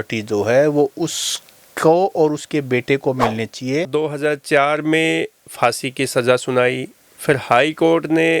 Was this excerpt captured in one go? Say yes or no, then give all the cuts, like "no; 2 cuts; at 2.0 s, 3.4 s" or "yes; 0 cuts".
no; 1 cut; at 3.9 s